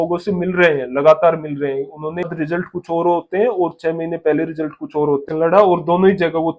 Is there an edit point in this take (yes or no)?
yes